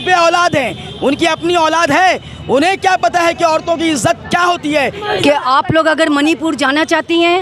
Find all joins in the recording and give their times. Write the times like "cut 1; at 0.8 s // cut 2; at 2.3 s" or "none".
cut 1; at 4.8 s